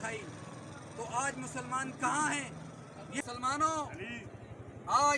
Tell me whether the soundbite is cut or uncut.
cut